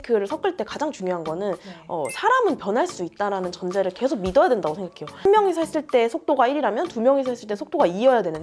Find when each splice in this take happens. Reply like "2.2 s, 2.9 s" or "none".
5.2 s